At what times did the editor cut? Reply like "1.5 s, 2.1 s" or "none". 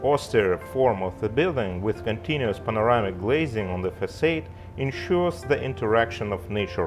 none